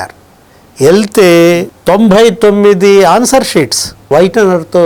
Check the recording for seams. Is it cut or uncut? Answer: uncut